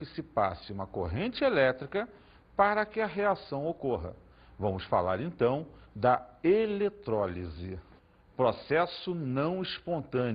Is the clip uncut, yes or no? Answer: no